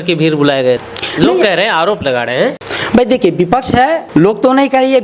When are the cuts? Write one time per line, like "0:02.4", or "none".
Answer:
0:01.0
0:02.7
0:04.0

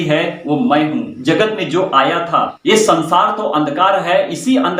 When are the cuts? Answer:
0:01.1
0:02.5

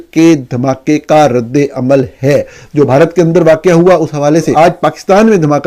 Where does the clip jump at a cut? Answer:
0:04.5

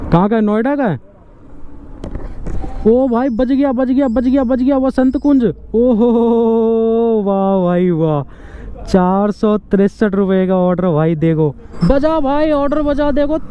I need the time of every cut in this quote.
0:02.3
0:11.7

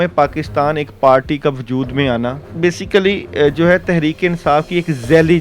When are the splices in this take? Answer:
0:02.4

